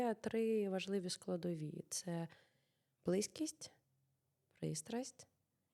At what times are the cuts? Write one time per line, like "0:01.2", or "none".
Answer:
none